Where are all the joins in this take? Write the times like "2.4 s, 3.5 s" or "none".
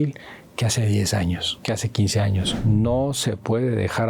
2.5 s